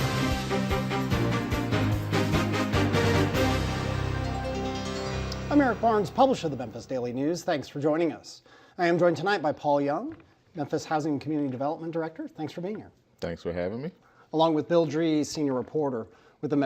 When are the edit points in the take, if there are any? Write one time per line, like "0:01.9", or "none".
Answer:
0:10.2